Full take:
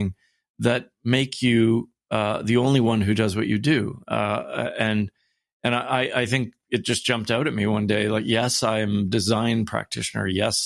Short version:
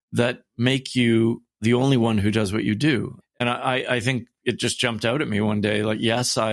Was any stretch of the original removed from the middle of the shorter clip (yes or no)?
yes